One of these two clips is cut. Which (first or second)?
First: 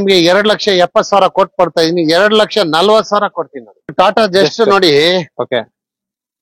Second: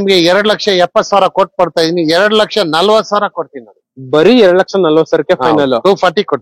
first